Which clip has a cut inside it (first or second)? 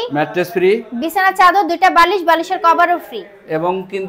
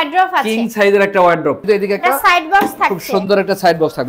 second